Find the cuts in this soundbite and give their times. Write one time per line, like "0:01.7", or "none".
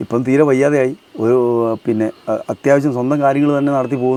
none

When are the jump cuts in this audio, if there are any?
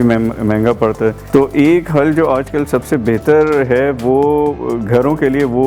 0:01.2

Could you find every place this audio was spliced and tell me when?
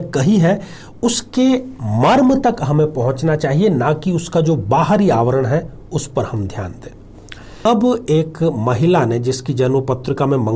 0:07.6

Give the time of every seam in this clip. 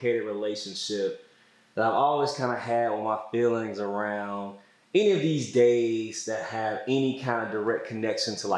none

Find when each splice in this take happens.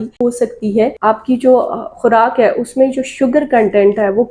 0:01.0

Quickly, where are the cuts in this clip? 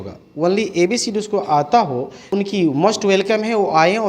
0:02.1

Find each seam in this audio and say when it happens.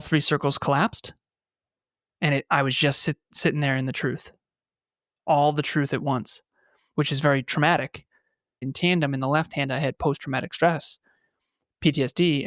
0:08.7

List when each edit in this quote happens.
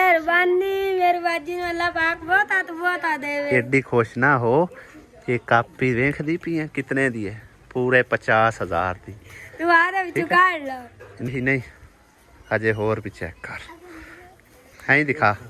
0:11.3

